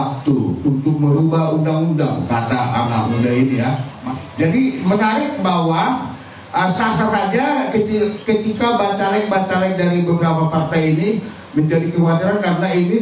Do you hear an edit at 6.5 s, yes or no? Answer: no